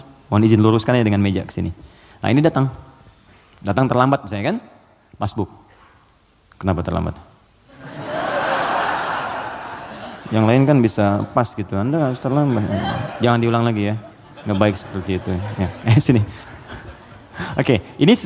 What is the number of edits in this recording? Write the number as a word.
zero